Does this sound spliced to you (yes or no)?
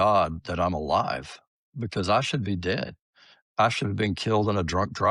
no